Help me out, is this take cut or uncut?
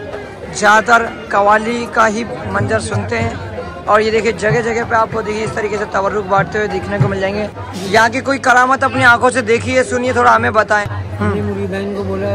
cut